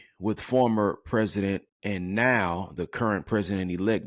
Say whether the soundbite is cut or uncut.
cut